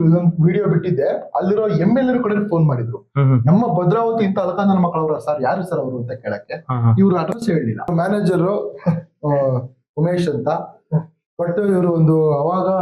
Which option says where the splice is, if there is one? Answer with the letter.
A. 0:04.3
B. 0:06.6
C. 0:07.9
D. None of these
C